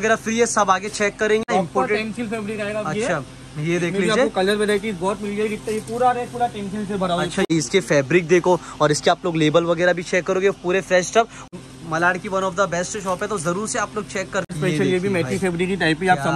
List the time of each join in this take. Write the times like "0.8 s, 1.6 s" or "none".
1.4 s, 7.5 s, 11.5 s, 14.5 s